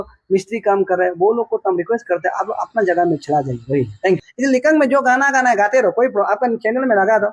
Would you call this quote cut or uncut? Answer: cut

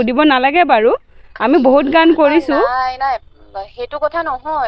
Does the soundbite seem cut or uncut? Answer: uncut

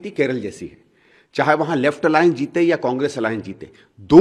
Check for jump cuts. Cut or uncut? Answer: uncut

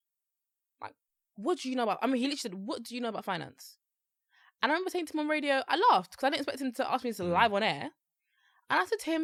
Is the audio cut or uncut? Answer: uncut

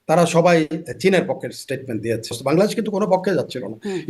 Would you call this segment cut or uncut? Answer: cut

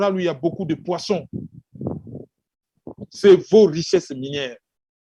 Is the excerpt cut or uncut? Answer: uncut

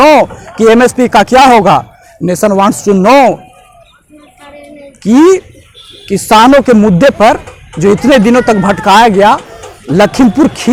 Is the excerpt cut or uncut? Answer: uncut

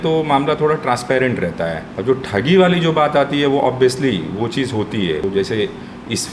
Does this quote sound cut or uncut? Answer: cut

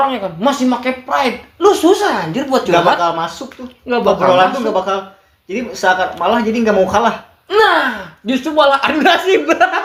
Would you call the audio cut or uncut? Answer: uncut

